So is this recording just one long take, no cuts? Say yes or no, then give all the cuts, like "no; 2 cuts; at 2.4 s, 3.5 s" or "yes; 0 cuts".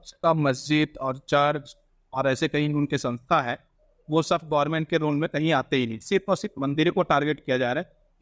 yes; 0 cuts